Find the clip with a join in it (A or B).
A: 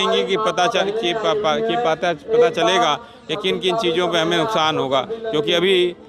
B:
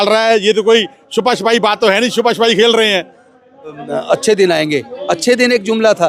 B